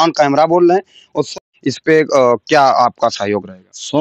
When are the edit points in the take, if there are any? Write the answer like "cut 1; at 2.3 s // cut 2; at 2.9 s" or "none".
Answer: cut 1; at 1.3 s